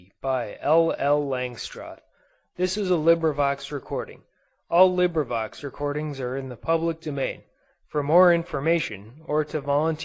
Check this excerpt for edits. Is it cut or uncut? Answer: uncut